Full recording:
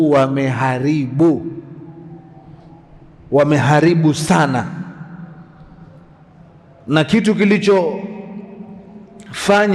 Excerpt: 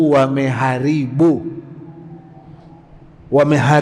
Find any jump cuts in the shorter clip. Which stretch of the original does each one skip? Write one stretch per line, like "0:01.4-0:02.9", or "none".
none